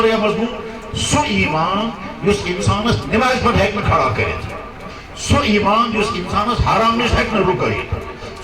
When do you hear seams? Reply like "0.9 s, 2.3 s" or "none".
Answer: none